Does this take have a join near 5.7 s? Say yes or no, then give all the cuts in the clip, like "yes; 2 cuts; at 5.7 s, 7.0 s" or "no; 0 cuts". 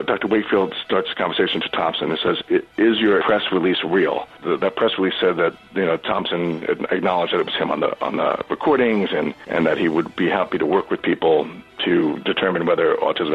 no; 3 cuts; at 3.2 s, 4.3 s, 9.4 s